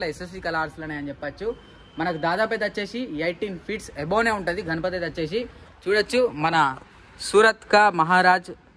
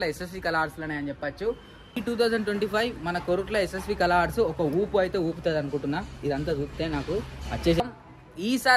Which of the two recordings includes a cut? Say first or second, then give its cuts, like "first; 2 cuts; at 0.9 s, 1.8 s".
second; 2 cuts; at 1.9 s, 7.8 s